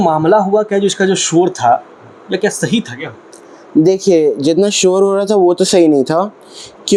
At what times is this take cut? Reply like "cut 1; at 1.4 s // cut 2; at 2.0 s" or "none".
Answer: none